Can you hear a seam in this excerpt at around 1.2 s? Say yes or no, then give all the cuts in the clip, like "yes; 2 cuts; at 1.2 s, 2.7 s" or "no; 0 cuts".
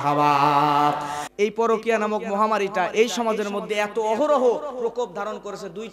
yes; 1 cut; at 1.2 s